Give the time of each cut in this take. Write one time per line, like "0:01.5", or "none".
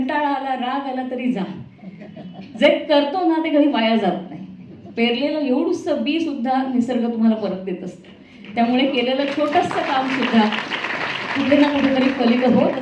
none